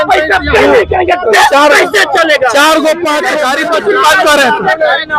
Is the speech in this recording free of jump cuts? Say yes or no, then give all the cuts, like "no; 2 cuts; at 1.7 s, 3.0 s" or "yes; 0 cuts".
no; 1 cut; at 3.4 s